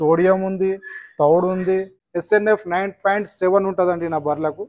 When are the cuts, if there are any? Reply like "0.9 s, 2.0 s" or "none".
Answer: 2.0 s